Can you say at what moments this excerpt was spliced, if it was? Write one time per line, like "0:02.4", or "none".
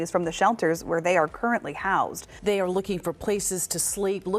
0:02.3